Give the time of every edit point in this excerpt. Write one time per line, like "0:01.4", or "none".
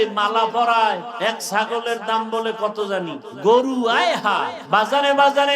0:01.1
0:03.3
0:04.6